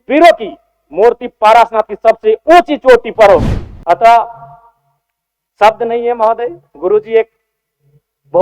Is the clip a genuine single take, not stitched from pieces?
no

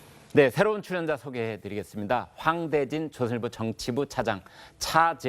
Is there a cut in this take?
yes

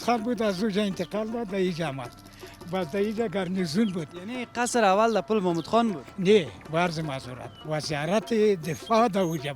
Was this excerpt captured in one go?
yes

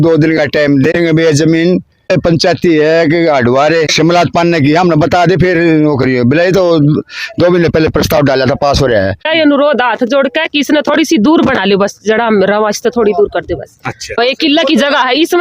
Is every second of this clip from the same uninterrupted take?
no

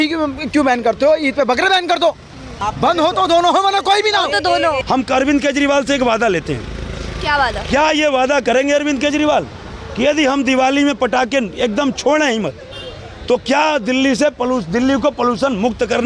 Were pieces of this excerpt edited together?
yes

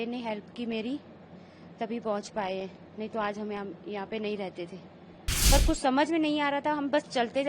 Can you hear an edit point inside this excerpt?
yes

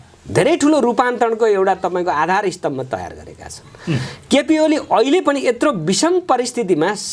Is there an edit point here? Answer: no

